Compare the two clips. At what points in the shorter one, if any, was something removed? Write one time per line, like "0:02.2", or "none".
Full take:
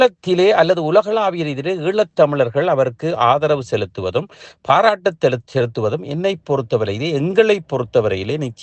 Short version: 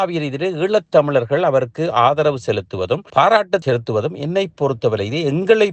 0:03.1
0:03.6